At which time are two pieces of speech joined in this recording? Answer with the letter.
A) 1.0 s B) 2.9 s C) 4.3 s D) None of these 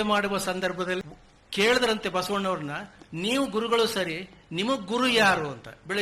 A